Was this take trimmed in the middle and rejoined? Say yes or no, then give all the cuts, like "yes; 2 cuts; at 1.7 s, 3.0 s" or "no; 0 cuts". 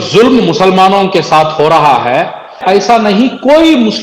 yes; 1 cut; at 2.6 s